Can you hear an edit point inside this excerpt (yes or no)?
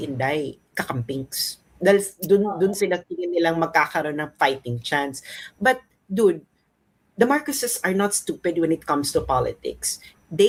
no